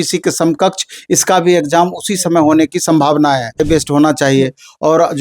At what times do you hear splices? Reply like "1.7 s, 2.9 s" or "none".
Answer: 3.6 s